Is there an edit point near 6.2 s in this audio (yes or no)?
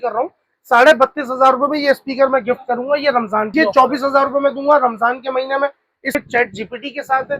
yes